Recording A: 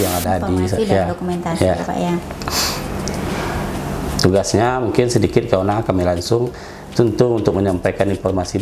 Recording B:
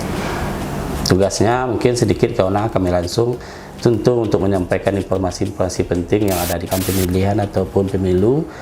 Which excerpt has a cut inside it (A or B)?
B